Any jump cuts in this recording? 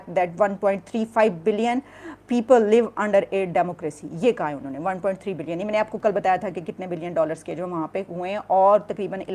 no; 0 cuts

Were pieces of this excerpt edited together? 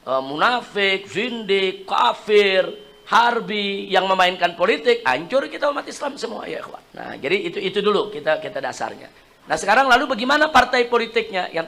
no; 0 cuts

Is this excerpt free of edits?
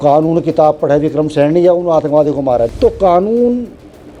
no; 1 cut; at 2.7 s

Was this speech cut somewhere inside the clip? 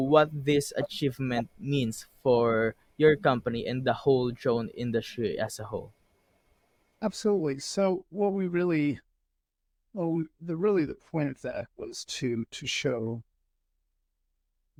no; 0 cuts

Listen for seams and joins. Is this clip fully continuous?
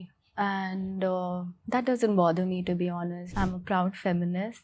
no; 1 cut; at 3.2 s

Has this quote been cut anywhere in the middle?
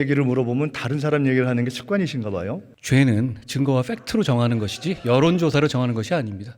yes; 1 cut; at 2.7 s

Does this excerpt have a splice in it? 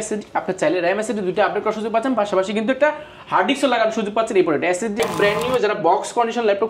yes; 1 cut; at 5.0 s

